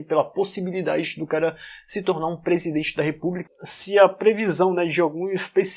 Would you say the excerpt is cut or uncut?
cut